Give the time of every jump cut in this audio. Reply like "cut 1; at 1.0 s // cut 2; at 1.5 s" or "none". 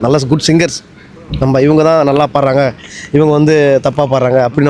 none

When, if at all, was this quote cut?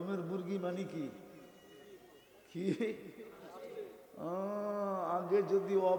none

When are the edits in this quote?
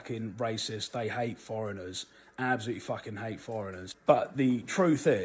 cut 1; at 3.9 s

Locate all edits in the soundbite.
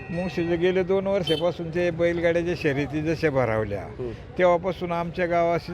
none

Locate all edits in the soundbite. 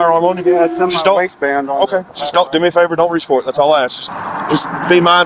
cut 1; at 4.1 s

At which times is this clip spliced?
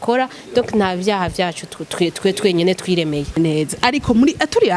cut 1; at 3.4 s

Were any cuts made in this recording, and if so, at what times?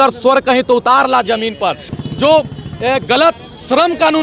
cut 1; at 1.9 s

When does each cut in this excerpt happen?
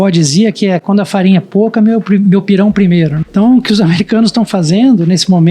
cut 1; at 3.2 s

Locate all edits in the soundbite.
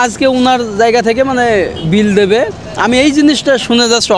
none

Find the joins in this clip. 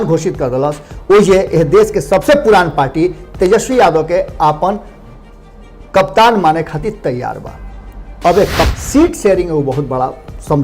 cut 1; at 8.7 s

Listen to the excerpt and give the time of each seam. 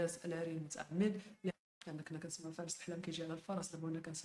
cut 1; at 1.5 s

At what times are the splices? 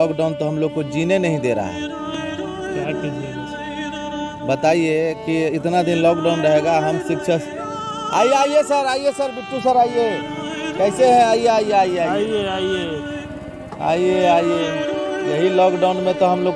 none

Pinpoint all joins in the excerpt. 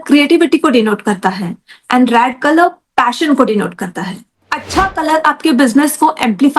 cut 1; at 4.5 s

